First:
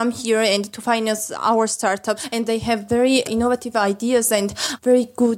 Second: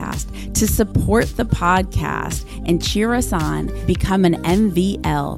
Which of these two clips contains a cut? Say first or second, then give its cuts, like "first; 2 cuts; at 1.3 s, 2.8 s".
first; 1 cut; at 2.3 s